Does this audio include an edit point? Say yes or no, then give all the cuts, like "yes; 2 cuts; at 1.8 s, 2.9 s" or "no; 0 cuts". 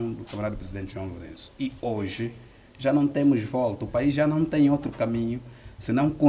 no; 0 cuts